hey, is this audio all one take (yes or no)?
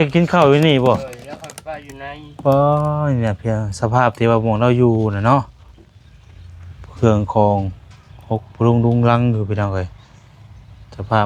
yes